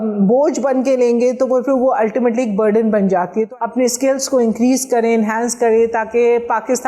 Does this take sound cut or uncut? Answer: cut